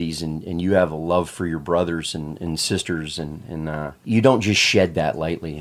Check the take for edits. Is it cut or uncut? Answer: cut